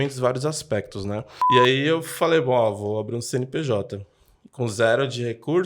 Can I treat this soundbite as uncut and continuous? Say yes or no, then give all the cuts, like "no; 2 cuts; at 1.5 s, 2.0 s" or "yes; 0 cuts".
no; 1 cut; at 1.3 s